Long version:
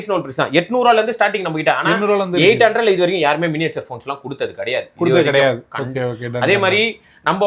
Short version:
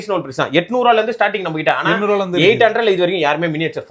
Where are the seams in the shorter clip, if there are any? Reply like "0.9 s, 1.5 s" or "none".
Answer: none